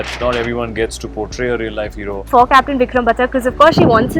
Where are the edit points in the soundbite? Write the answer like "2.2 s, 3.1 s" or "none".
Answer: 2.3 s